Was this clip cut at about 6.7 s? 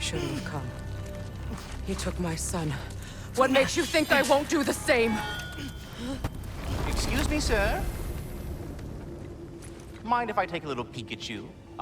yes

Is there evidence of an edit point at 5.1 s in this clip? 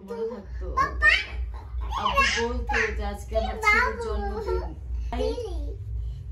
yes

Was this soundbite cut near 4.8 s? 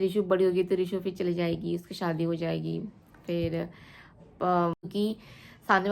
yes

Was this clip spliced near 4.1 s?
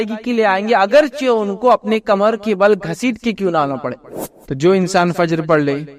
yes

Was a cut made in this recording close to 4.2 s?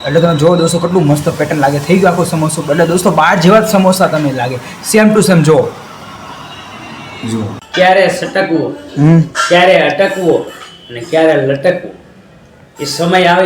no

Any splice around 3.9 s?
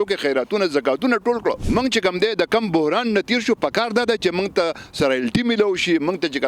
no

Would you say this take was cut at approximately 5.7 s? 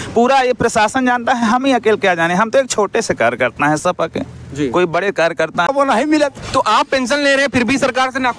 yes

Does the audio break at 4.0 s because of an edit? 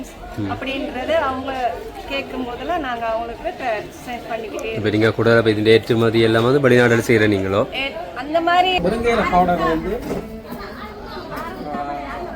no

